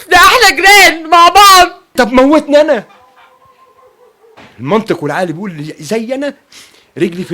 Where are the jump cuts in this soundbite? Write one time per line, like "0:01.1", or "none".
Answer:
0:01.9